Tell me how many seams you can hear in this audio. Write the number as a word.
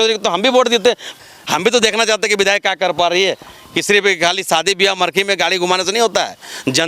one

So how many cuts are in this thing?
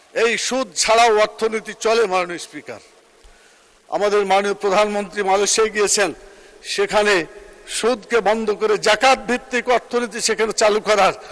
zero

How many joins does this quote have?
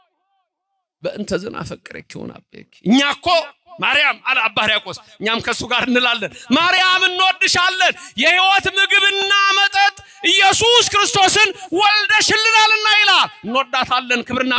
zero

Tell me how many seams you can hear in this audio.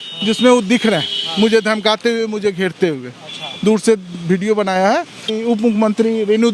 one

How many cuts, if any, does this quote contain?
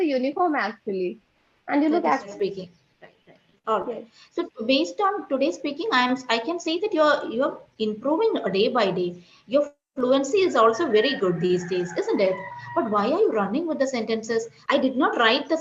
one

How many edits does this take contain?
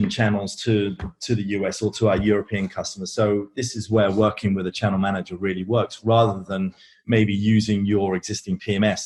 zero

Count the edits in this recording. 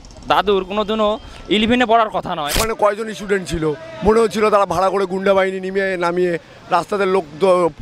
one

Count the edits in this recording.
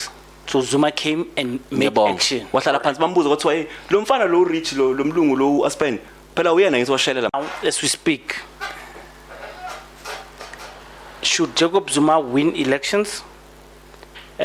one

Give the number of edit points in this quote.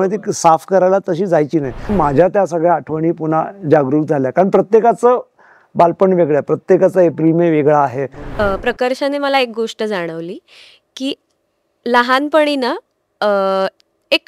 two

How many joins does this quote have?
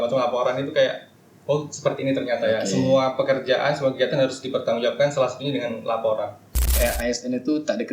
one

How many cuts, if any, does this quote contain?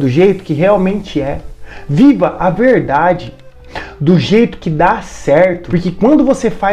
one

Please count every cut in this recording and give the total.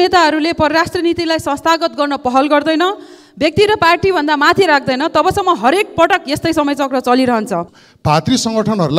one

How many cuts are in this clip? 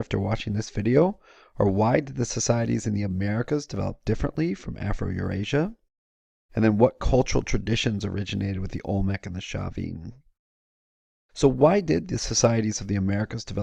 one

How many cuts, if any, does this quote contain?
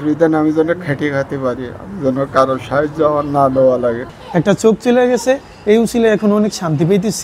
one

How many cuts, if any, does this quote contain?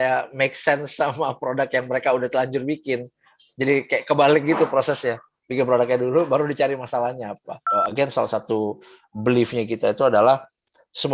one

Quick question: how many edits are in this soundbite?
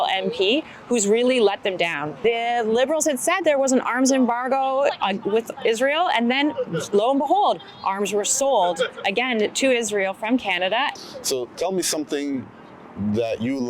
two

